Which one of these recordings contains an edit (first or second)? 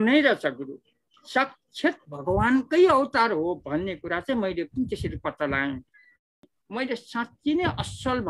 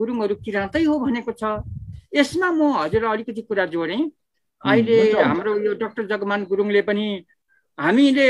first